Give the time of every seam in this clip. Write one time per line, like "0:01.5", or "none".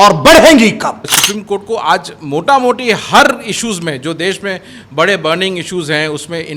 0:01.0